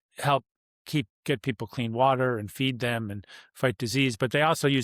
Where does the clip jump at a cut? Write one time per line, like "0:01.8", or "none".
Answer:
none